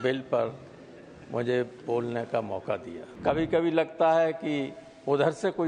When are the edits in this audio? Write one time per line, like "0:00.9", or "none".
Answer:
0:03.0